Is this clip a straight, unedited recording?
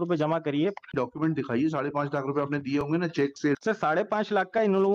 no; 2 cuts; at 0.9 s, 3.6 s

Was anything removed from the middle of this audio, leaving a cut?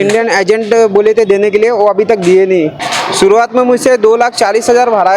yes; 1 cut; at 2.9 s

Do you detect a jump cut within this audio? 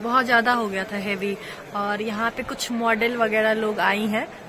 no; 0 cuts

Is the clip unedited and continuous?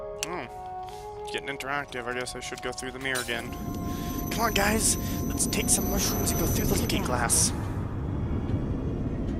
yes; 0 cuts

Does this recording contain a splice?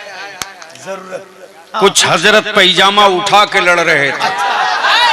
no; 0 cuts

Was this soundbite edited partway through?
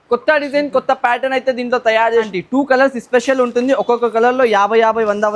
yes; 1 cut; at 2.3 s

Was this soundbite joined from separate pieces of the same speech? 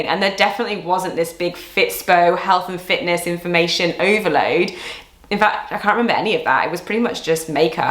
no; 0 cuts

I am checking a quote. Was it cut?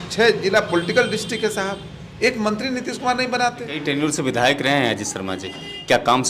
yes; 1 cut; at 3.7 s

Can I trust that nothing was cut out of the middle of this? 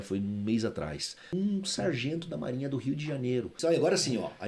no; 1 cut; at 3.5 s

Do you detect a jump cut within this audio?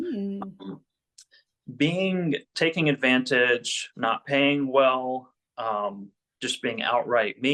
no; 0 cuts

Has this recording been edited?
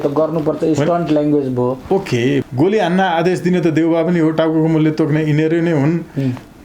yes; 1 cut; at 2.4 s

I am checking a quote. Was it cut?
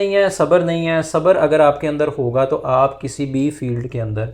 no; 0 cuts

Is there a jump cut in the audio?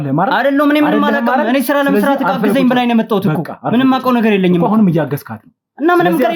no; 0 cuts

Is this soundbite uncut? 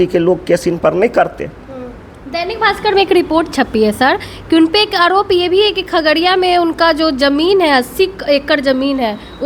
yes; 0 cuts

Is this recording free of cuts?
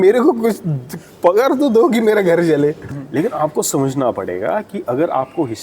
no; 1 cut; at 2.9 s

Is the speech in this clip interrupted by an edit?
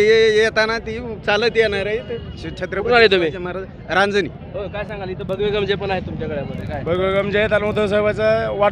no; 0 cuts

